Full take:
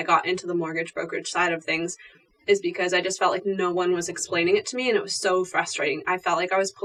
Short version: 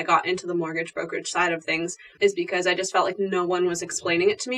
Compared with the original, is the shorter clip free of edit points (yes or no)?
no